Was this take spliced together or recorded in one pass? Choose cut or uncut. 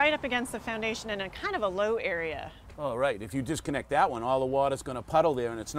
uncut